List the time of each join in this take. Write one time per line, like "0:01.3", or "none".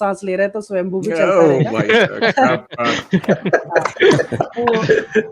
none